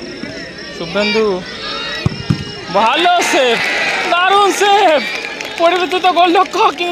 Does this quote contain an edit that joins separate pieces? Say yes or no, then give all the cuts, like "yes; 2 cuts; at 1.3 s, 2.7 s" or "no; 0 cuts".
no; 0 cuts